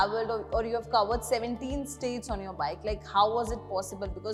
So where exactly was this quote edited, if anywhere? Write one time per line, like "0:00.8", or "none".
none